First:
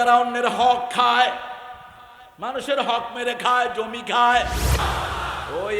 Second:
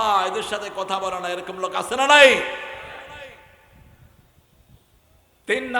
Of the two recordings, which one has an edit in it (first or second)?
first